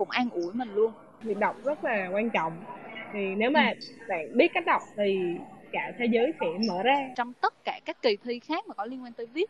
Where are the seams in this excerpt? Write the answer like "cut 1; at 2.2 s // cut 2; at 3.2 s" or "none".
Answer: cut 1; at 1.2 s // cut 2; at 7.1 s

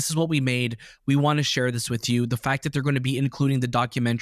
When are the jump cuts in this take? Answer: none

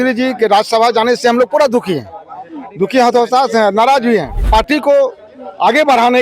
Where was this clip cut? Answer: cut 1; at 4.5 s

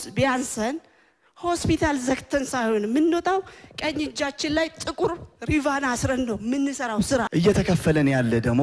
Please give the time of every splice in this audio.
cut 1; at 7.3 s

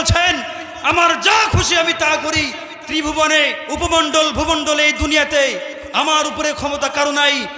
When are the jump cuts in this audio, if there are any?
cut 1; at 3.6 s

